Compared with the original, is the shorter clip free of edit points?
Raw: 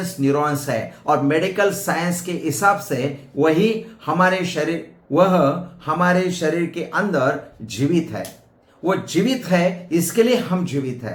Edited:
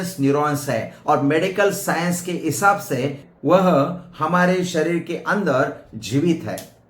no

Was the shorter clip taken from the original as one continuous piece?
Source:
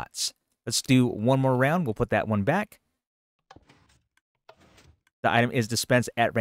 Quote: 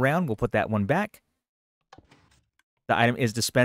no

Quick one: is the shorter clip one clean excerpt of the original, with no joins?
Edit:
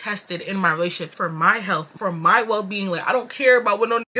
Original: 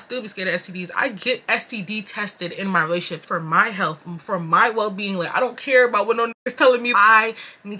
no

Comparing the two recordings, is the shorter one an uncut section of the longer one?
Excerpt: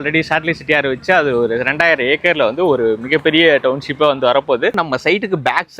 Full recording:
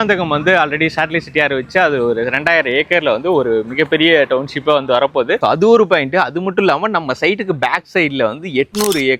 no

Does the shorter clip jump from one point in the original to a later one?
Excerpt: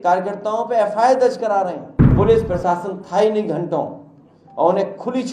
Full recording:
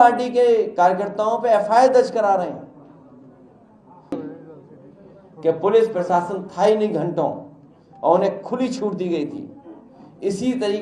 yes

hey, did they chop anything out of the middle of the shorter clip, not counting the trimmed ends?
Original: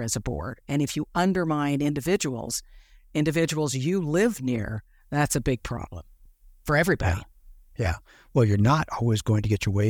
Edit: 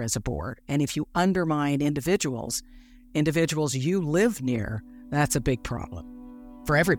no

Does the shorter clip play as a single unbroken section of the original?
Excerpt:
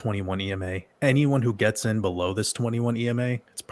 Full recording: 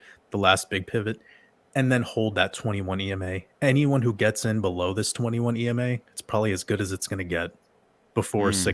yes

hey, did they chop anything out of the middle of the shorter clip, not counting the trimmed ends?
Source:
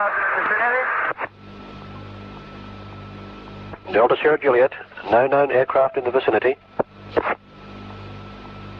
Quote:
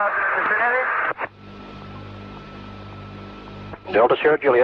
no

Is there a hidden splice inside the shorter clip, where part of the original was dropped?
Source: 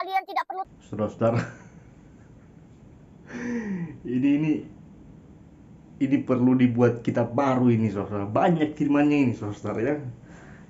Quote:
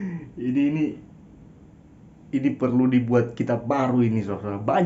no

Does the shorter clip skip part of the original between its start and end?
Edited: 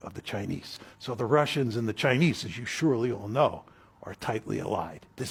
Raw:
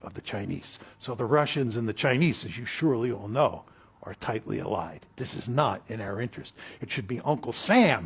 no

